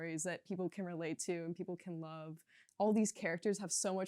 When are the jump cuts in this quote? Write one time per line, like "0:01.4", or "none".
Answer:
0:02.6

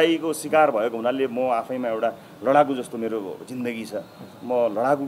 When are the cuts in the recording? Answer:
none

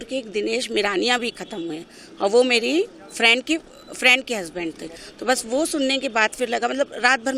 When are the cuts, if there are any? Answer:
none

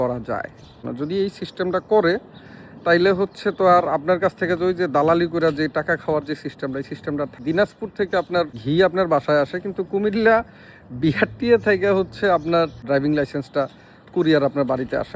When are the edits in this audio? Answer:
0:00.8
0:07.4
0:08.6
0:12.8

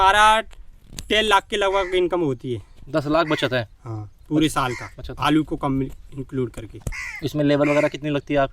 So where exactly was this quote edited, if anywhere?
none

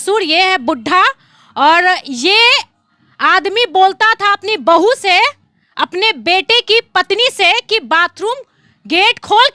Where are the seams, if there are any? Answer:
none

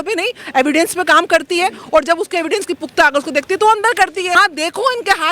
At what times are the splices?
0:04.4

